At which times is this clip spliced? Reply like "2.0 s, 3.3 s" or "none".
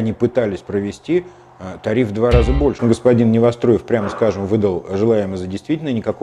2.8 s